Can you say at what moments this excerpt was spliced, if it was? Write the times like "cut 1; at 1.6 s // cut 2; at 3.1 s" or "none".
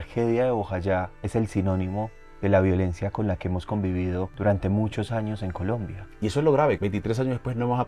cut 1; at 4.3 s // cut 2; at 6.8 s